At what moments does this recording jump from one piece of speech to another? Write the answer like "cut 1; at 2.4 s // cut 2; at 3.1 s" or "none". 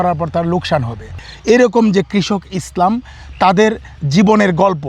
cut 1; at 1.3 s

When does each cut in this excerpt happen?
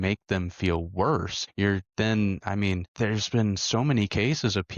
cut 1; at 1.4 s // cut 2; at 2.9 s

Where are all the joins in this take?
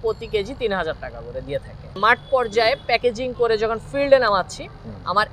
cut 1; at 2.0 s

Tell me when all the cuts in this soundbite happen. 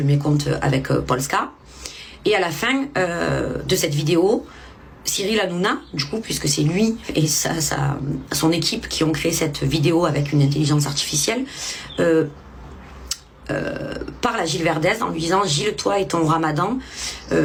none

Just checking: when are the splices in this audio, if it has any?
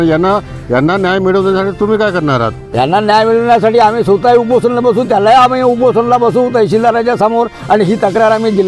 none

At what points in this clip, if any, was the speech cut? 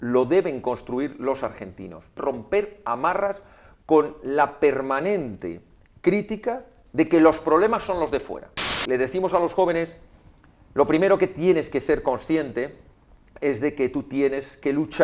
cut 1; at 2.2 s // cut 2; at 8.8 s

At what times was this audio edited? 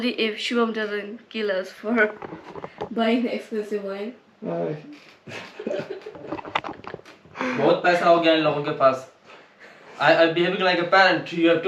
none

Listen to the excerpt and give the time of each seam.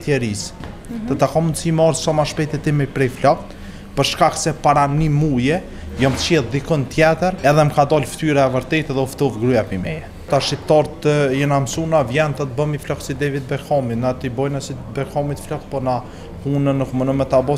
cut 1; at 7.4 s // cut 2; at 10.3 s

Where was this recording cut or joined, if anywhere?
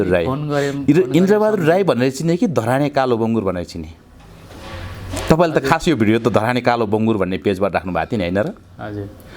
none

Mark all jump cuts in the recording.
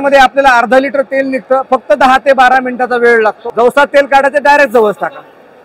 cut 1; at 3.4 s

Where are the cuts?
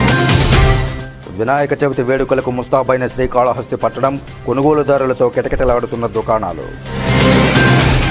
cut 1; at 0.9 s

